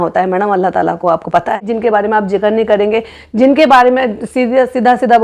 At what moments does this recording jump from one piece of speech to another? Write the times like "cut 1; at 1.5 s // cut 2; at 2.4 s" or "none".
cut 1; at 1.7 s